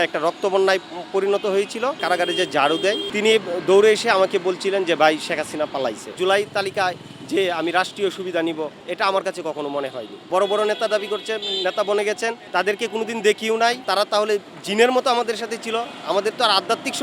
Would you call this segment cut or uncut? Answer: cut